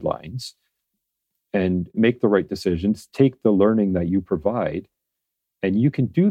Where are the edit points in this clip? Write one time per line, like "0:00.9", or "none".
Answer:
0:01.9